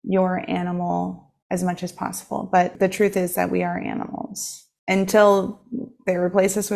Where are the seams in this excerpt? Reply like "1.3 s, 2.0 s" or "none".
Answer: 1.3 s, 2.7 s